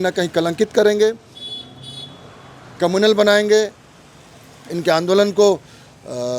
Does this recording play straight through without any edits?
yes; 0 cuts

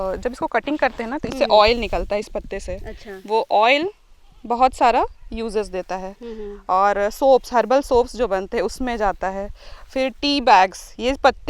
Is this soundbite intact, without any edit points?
yes; 0 cuts

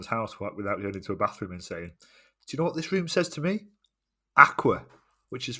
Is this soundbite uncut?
yes; 0 cuts

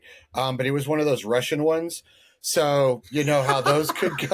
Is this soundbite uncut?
yes; 0 cuts

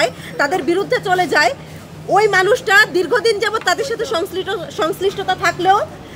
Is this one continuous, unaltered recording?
yes; 0 cuts

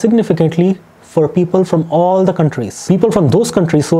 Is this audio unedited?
yes; 0 cuts

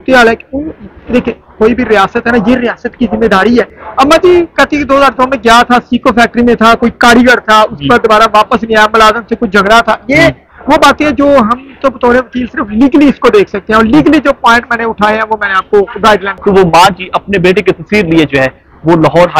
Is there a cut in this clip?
yes; 2 cuts; at 3.8 s, 16.3 s

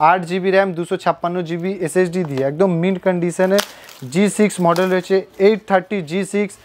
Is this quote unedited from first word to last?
yes; 0 cuts

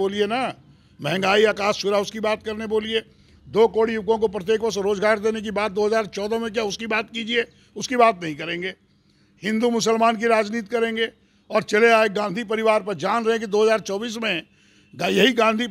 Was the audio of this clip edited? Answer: no; 0 cuts

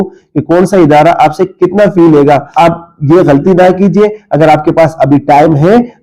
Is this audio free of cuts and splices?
no; 1 cut; at 2.5 s

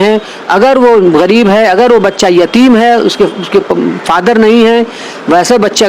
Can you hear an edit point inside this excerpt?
no; 0 cuts

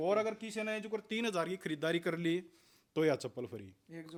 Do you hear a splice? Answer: no; 0 cuts

